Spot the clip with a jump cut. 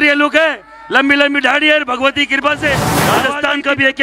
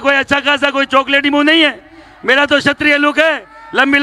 first; 1 cut; at 2.9 s

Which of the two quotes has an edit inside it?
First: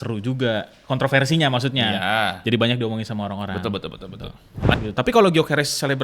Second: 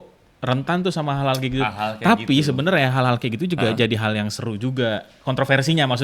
first; 1 cut; at 4.5 s

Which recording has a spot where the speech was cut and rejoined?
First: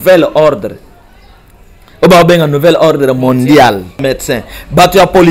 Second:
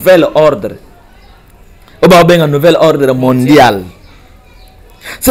first; 1 cut; at 4.0 s

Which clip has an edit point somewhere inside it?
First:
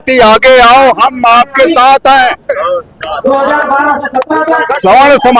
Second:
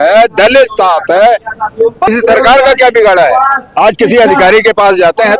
second; 1 cut; at 2.1 s

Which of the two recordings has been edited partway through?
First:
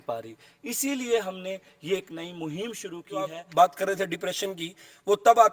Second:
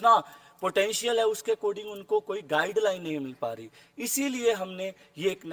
first; 1 cut; at 3.4 s

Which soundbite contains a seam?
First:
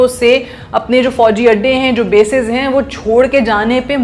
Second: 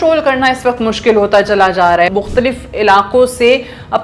second; 1 cut; at 2.1 s

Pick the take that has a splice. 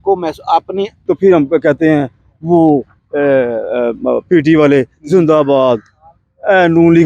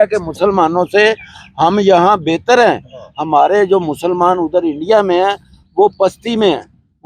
first; 1 cut; at 0.9 s

